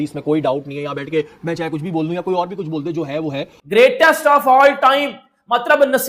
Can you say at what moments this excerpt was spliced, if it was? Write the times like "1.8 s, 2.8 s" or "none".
3.5 s